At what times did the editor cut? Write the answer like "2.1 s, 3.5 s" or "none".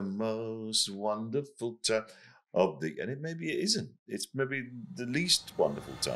none